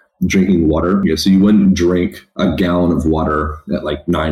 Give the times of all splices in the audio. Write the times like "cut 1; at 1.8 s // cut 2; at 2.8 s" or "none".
cut 1; at 1.0 s // cut 2; at 2.2 s